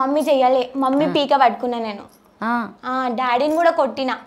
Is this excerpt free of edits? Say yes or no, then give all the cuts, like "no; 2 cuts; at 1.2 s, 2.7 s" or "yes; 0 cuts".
yes; 0 cuts